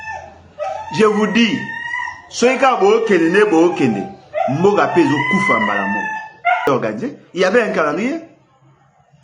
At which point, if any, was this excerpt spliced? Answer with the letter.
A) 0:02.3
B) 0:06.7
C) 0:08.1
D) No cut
B